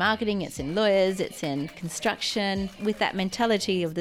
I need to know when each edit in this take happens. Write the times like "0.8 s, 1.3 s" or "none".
1.8 s, 2.8 s